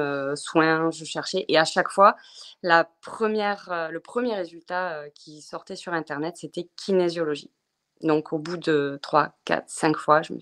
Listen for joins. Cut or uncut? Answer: uncut